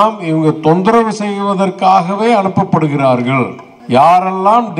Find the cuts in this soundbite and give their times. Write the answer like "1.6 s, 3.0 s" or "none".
3.7 s